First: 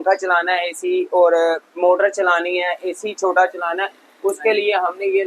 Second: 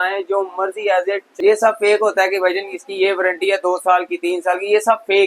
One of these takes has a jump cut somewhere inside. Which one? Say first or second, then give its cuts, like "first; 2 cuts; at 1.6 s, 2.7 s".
second; 1 cut; at 1.3 s